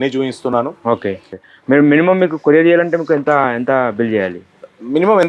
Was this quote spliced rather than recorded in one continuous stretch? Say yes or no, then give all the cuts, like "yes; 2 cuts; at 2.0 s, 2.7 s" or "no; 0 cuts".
yes; 1 cut; at 1.3 s